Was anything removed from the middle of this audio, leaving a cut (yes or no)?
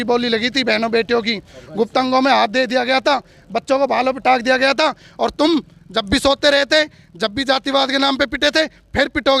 no